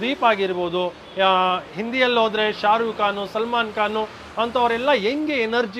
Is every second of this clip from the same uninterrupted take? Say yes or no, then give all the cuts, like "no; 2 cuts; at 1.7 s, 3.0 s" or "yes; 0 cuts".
yes; 0 cuts